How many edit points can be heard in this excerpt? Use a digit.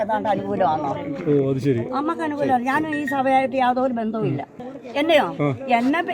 1